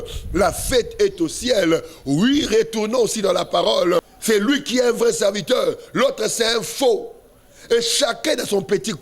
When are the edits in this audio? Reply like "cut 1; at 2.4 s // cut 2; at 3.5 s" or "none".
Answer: cut 1; at 4.1 s